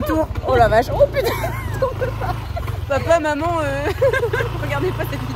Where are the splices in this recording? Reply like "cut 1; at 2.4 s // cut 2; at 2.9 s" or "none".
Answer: none